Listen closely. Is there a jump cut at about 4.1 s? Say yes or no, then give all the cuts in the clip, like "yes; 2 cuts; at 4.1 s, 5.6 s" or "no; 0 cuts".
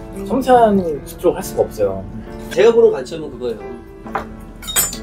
no; 1 cut; at 2.5 s